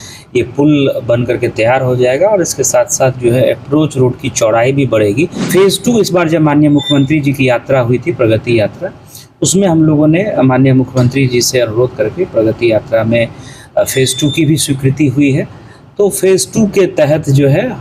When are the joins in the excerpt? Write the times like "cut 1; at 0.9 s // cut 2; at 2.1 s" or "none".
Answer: cut 1; at 5.4 s